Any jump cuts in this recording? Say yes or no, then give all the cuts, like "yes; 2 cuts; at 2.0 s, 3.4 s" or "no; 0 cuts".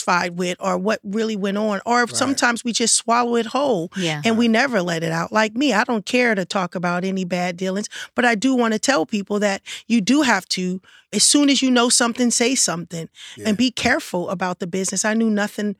yes; 1 cut; at 13.4 s